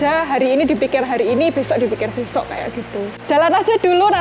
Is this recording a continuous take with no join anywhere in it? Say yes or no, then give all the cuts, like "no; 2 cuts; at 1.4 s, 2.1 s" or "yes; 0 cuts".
no; 1 cut; at 3.2 s